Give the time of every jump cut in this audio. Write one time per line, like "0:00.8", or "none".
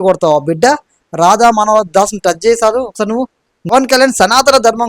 0:03.7